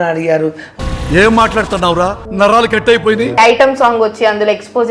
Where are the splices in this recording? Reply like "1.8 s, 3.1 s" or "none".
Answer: 3.3 s